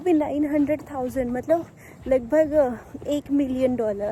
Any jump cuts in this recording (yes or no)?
no